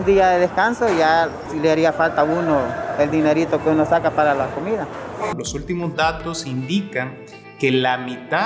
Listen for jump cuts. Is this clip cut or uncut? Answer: cut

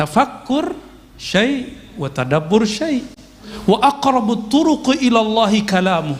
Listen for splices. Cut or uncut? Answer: cut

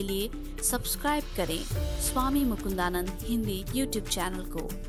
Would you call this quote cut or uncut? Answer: uncut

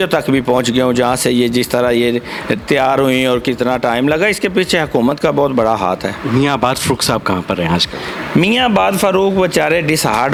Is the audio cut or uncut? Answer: uncut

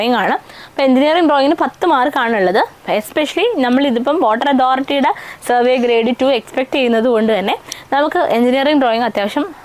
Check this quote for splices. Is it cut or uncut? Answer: uncut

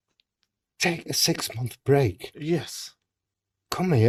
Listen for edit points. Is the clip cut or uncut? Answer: uncut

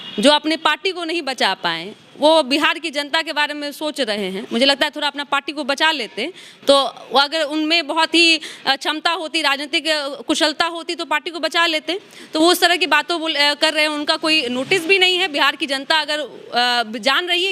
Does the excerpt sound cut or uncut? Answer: uncut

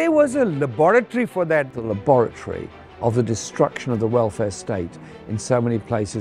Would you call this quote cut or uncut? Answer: cut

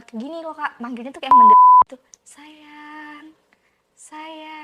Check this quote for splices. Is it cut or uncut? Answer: cut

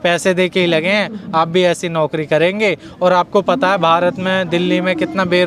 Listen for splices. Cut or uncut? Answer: uncut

